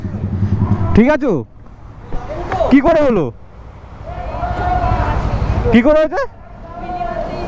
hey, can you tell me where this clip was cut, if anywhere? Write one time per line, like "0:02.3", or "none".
none